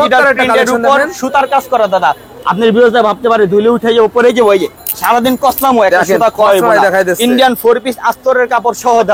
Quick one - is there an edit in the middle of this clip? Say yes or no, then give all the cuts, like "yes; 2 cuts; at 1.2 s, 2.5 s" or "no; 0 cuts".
no; 0 cuts